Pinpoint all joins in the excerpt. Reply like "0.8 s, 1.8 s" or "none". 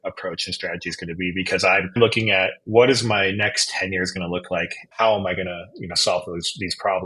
2.0 s, 4.8 s